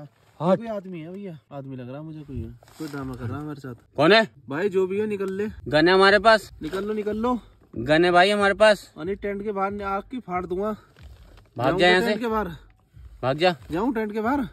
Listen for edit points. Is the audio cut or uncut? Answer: cut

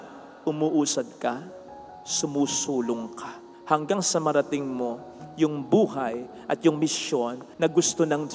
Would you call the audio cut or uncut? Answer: cut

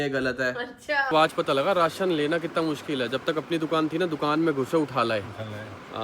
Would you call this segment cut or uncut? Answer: cut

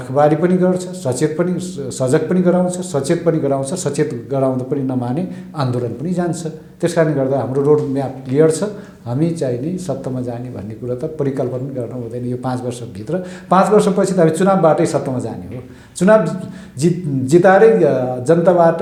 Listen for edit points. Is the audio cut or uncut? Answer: uncut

